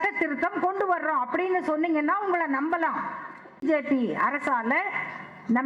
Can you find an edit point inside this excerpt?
yes; 1 cut; at 3.6 s

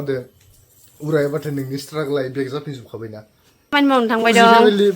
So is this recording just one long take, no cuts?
no; 1 cut; at 3.7 s

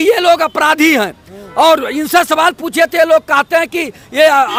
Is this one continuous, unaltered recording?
yes; 0 cuts

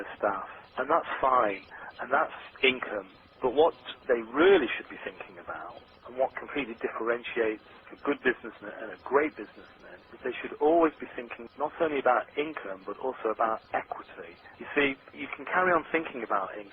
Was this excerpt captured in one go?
no; 1 cut; at 3.2 s

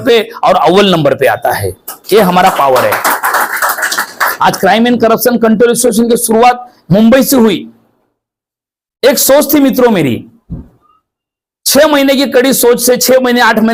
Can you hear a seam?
no; 0 cuts

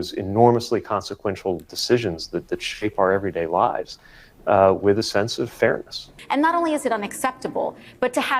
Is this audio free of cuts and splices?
no; 1 cut; at 6.1 s

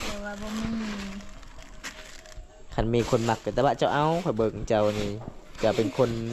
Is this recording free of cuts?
yes; 0 cuts

